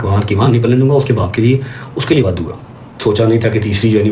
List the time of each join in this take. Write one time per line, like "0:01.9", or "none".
0:02.9